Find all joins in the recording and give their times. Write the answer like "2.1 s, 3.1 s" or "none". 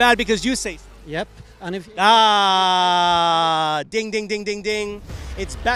none